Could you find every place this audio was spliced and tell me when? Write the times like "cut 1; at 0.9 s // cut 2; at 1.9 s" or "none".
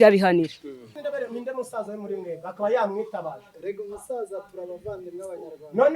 cut 1; at 1.0 s